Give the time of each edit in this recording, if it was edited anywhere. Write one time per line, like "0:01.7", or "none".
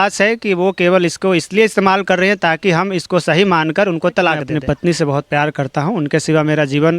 0:04.5